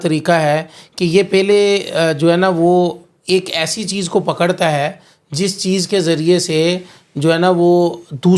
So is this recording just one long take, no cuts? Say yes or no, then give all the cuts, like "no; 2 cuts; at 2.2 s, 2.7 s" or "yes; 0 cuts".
yes; 0 cuts